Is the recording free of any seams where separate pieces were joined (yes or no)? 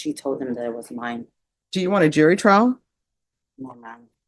yes